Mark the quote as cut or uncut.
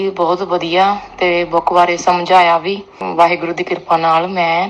cut